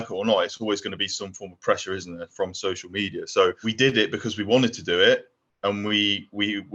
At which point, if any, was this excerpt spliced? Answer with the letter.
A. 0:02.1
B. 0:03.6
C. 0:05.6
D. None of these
B